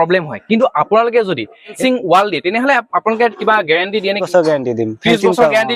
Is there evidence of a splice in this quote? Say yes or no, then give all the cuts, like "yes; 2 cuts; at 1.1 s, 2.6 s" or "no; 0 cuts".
yes; 2 cuts; at 1.7 s, 4.2 s